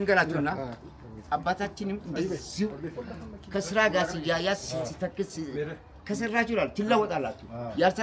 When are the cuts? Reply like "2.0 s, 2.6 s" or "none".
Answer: none